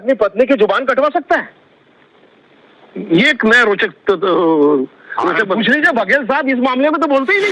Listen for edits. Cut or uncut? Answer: uncut